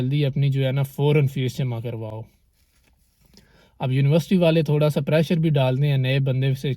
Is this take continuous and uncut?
yes; 0 cuts

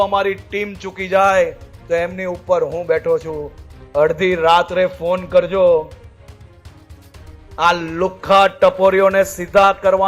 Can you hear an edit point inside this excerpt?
no; 0 cuts

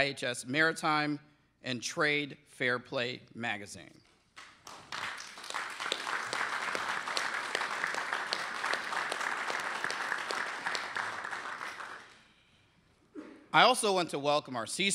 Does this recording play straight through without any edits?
yes; 0 cuts

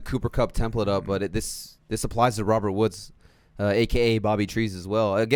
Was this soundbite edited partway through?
no; 0 cuts

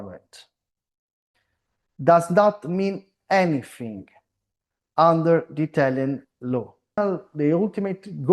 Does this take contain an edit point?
yes; 1 cut; at 7.0 s

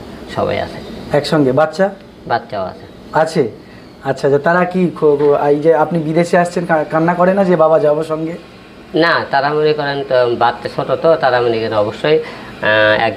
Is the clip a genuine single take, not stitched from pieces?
yes; 0 cuts

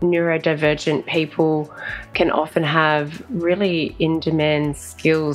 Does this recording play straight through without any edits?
yes; 0 cuts

